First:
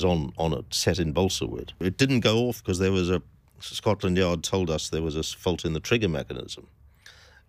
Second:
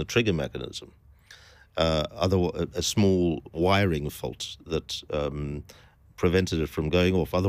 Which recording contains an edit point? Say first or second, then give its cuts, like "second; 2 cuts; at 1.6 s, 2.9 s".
first; 1 cut; at 1.8 s